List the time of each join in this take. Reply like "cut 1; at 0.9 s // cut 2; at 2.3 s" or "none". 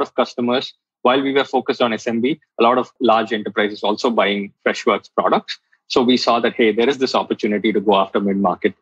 cut 1; at 2.9 s // cut 2; at 4.5 s